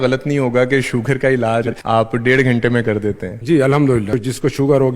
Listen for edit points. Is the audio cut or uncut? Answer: cut